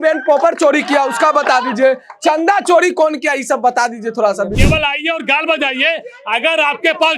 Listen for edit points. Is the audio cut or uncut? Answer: cut